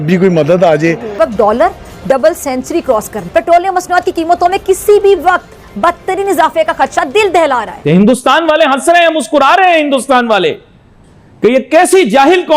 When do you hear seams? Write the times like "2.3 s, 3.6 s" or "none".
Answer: 1.1 s, 3.2 s, 7.9 s